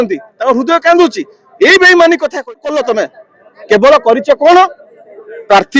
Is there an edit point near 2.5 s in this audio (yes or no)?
yes